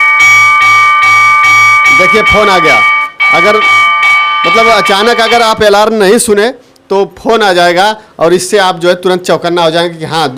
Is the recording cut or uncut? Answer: uncut